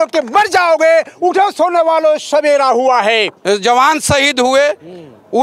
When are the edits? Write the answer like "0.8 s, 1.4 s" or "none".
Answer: 3.3 s